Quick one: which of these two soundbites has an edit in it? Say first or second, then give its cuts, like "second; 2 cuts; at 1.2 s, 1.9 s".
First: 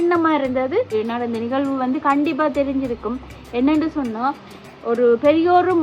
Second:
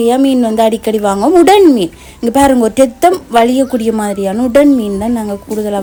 first; 1 cut; at 0.9 s